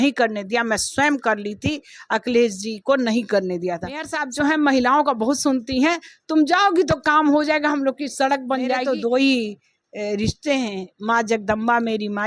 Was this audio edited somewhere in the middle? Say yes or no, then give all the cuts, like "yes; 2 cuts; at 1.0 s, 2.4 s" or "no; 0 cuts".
yes; 2 cuts; at 4.2 s, 8.8 s